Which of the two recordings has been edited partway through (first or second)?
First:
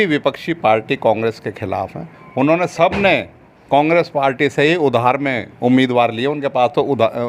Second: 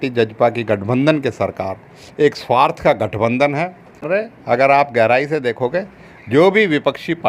second